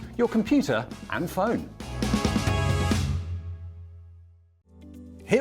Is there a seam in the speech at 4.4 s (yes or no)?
no